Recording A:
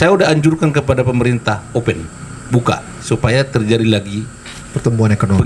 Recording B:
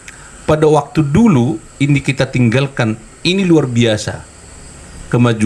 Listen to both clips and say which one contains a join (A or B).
A